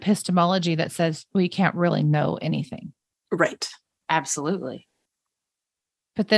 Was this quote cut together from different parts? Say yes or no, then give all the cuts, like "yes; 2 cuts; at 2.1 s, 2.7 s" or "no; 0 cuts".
no; 0 cuts